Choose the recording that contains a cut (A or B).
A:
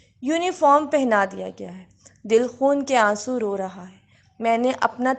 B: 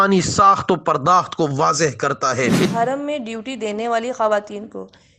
B